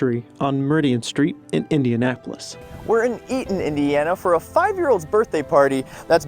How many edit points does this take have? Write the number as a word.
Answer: one